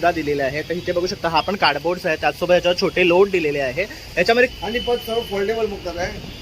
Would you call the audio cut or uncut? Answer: cut